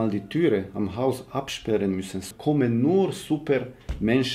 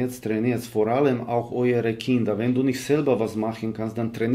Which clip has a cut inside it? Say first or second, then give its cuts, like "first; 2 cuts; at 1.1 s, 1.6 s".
first; 1 cut; at 2.2 s